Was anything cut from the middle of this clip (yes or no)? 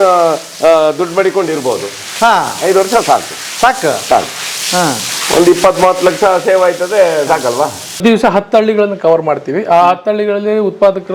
yes